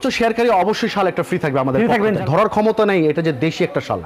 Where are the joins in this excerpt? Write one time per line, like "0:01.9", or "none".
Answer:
0:02.2